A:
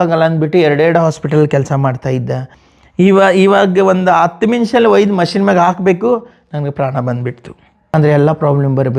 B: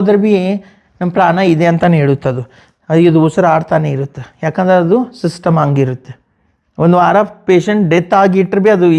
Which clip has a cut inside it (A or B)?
A